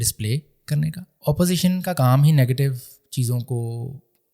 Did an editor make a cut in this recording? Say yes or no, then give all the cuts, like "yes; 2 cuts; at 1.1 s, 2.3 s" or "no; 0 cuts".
yes; 1 cut; at 1.1 s